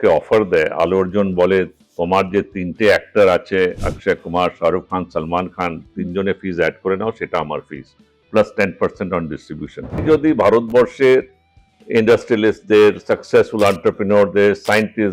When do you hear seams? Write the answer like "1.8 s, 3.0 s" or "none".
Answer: 10.0 s